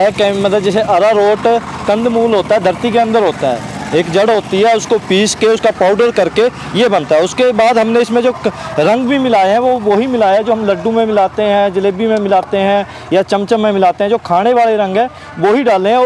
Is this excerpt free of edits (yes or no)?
yes